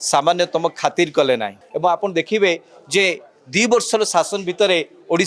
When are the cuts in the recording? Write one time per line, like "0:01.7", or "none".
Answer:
0:01.6